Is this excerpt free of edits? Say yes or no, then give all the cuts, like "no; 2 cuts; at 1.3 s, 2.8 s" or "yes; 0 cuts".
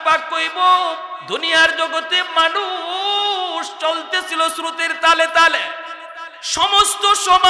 no; 1 cut; at 1.1 s